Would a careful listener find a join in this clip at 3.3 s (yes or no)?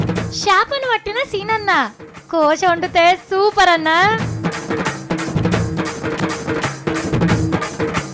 no